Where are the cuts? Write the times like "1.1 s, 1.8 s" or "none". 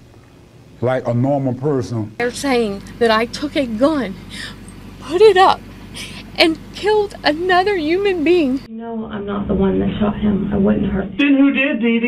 2.2 s, 8.7 s